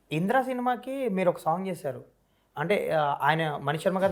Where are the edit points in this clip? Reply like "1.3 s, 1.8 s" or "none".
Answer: none

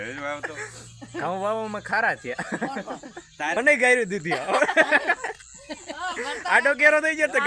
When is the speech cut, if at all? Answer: 3.6 s

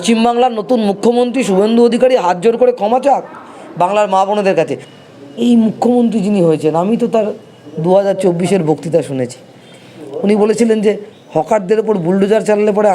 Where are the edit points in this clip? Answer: 4.8 s

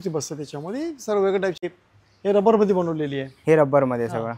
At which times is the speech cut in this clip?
1.6 s

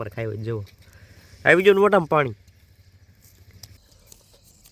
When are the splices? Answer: 3.8 s

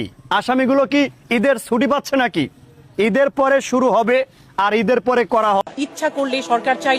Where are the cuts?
5.6 s

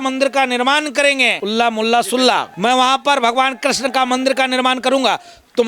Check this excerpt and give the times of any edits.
1.4 s, 2.5 s

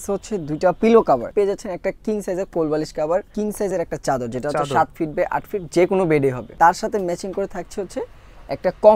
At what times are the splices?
1.3 s, 3.3 s, 6.4 s

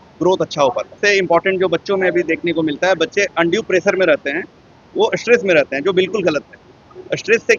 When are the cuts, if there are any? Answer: 1.0 s

